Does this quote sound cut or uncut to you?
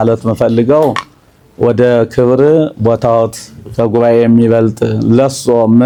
uncut